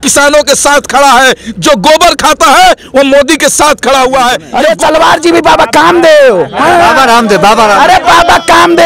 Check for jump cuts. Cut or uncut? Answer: cut